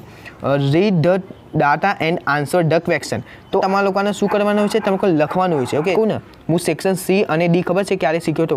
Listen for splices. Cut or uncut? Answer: cut